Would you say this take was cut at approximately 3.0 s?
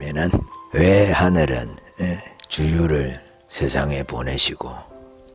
no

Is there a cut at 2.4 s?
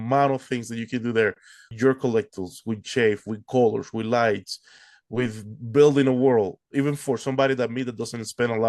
no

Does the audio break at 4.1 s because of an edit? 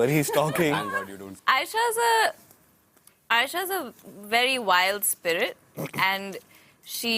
no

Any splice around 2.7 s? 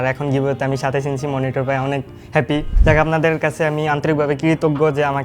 yes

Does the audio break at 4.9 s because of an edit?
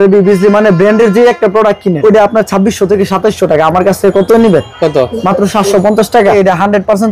no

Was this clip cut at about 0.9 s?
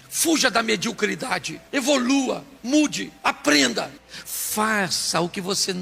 no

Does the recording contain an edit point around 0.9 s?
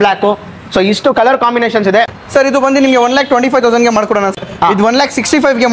no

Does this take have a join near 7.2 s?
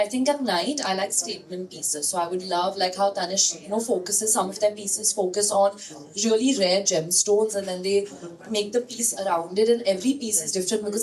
no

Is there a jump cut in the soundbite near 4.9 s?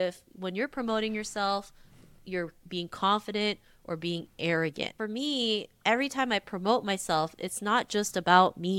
yes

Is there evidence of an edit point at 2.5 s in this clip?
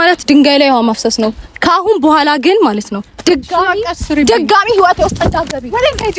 no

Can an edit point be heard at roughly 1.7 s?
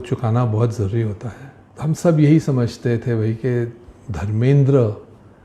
yes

